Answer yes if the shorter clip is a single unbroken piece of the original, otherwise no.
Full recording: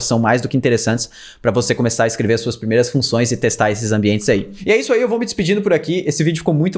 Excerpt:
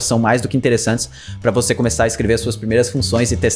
yes